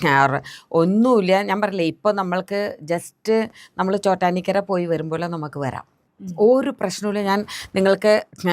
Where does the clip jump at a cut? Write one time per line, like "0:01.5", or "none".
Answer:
0:06.0